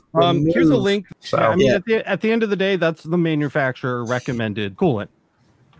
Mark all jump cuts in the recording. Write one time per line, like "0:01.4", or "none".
0:01.1